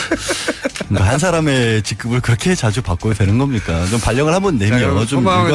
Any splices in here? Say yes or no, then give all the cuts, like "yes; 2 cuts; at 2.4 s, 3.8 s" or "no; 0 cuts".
yes; 1 cut; at 1.9 s